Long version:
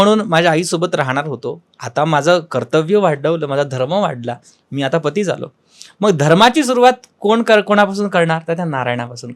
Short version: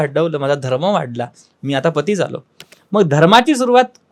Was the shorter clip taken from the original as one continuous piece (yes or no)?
yes